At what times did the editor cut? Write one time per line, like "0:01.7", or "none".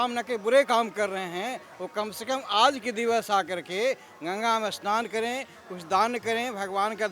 none